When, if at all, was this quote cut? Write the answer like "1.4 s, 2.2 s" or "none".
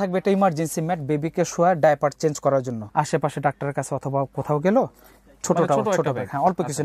2.8 s